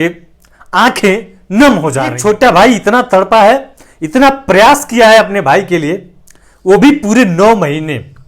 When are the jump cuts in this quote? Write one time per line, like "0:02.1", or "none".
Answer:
0:02.2